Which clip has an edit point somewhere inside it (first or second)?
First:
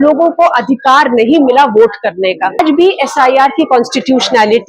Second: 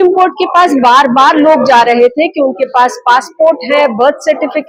first